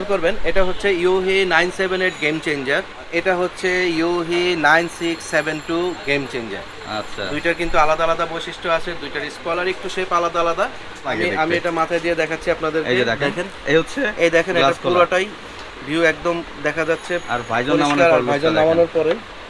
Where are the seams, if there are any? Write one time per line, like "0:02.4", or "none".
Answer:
0:03.1
0:11.2